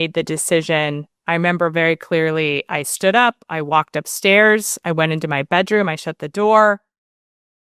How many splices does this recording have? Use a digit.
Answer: 0